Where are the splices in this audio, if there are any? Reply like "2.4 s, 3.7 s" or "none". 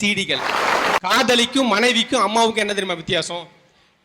1.0 s